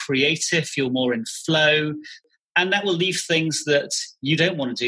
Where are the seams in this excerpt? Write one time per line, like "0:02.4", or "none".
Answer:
0:02.3